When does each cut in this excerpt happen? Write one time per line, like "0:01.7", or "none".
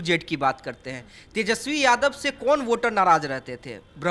none